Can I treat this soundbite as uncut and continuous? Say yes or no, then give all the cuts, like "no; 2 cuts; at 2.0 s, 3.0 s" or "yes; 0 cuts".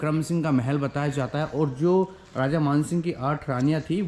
yes; 0 cuts